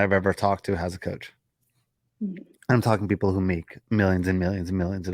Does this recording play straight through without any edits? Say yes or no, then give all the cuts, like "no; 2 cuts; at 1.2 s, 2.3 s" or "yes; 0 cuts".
yes; 0 cuts